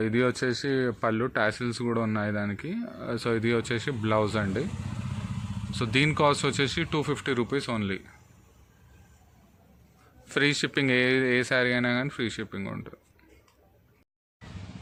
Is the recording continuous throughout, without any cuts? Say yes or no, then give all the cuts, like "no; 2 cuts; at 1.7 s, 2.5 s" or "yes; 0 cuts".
yes; 0 cuts